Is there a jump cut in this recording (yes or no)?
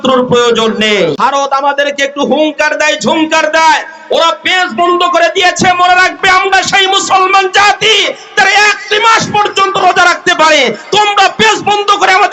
yes